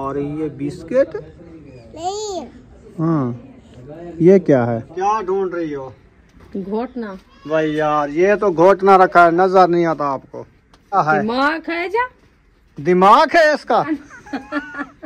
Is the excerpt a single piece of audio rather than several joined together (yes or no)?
no